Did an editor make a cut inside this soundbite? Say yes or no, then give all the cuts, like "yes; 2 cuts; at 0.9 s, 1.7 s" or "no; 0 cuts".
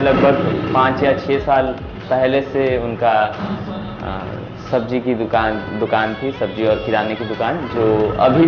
no; 0 cuts